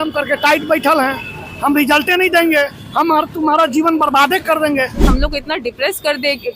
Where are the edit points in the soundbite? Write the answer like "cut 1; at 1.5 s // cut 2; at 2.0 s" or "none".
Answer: cut 1; at 5.0 s